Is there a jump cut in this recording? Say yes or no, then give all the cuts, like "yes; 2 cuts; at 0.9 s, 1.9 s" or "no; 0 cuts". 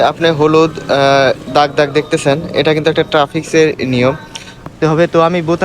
yes; 1 cut; at 4.6 s